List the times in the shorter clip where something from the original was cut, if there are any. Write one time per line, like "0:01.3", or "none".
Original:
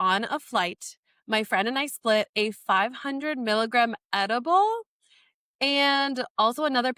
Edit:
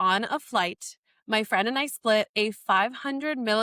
none